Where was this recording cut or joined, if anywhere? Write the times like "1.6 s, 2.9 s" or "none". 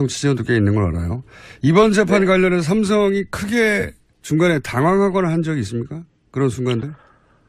5.2 s